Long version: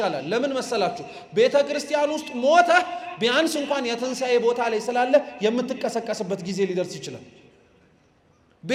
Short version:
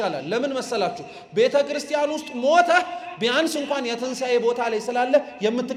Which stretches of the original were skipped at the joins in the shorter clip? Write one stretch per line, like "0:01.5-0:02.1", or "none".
none